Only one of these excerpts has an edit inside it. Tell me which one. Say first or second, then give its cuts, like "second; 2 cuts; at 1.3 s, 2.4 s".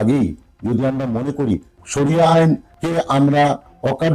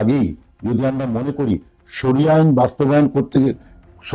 first; 2 cuts; at 1.8 s, 2.7 s